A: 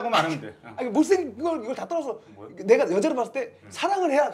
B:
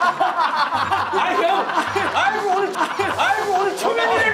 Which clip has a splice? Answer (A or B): B